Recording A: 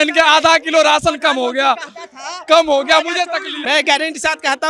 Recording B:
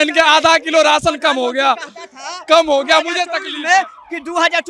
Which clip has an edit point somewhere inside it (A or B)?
A